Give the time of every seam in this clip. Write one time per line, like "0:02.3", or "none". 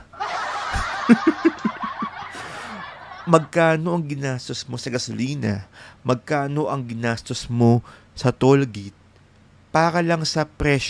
none